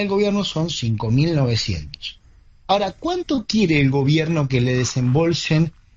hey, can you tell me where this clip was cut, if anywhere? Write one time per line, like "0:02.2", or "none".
none